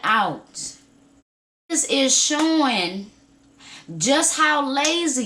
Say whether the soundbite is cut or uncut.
cut